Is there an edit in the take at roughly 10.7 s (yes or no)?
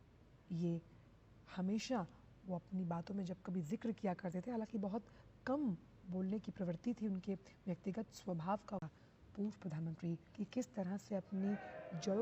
no